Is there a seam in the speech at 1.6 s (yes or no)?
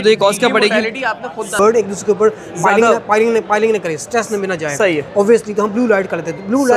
yes